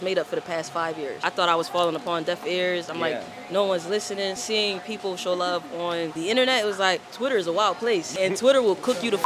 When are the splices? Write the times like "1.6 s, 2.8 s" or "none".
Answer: 1.3 s, 4.4 s, 6.1 s, 7.1 s, 8.1 s